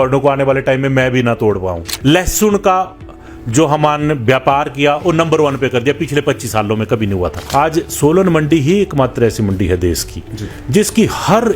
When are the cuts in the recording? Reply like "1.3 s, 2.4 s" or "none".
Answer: 1.9 s, 7.4 s

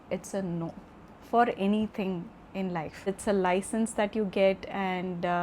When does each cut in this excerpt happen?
3.0 s

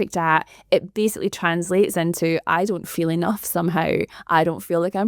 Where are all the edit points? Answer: 4.2 s

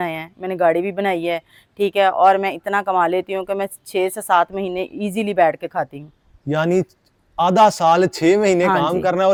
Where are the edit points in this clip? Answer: none

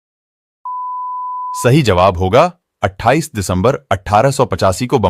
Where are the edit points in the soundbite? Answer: 1.6 s

